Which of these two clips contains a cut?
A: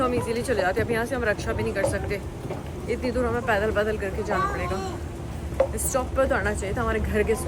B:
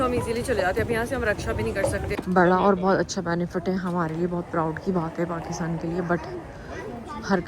B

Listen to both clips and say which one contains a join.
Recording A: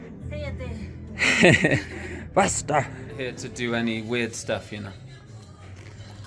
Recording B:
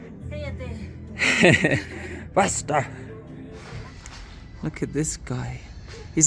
A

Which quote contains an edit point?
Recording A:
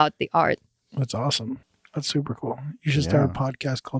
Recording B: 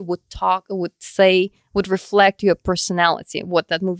A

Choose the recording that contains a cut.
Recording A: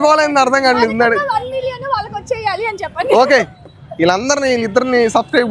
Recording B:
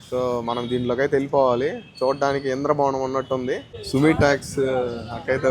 B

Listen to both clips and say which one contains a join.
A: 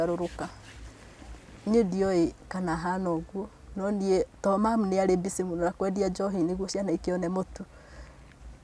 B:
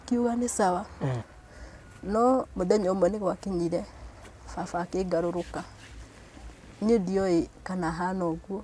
B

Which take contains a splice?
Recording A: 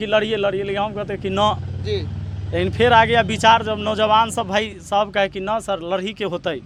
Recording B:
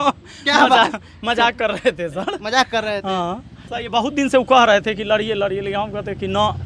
B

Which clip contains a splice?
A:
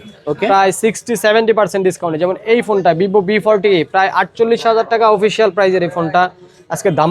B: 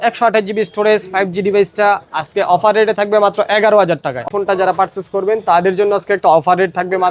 B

